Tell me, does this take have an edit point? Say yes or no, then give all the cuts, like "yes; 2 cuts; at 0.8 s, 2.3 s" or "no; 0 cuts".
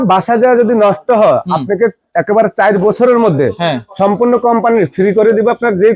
no; 0 cuts